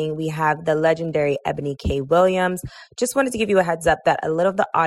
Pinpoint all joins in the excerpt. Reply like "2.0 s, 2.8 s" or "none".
none